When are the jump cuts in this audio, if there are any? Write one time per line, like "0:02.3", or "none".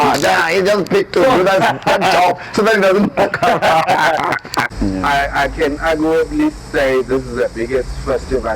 0:04.7